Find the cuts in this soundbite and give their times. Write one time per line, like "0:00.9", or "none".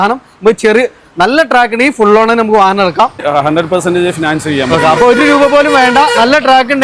0:03.2